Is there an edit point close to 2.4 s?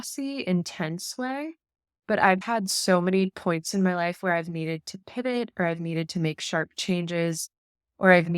yes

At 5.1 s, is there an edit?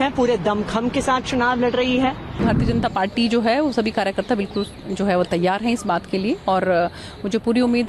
no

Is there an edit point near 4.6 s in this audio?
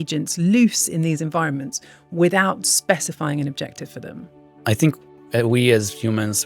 yes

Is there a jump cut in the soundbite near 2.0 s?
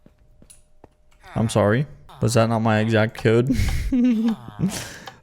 yes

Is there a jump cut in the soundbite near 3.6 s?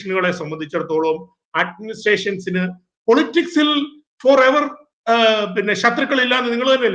no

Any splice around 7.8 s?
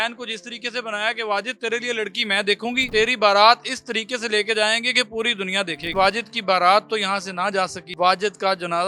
yes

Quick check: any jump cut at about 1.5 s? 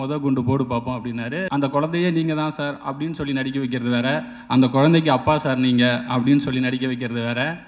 yes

